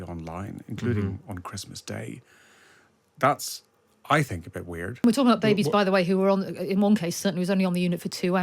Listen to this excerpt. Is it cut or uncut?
cut